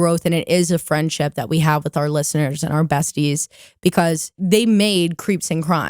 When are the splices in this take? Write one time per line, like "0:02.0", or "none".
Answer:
0:04.3